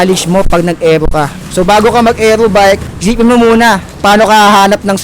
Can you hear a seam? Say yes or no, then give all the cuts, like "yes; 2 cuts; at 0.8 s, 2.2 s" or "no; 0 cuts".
yes; 3 cuts; at 1.4 s, 2.9 s, 3.9 s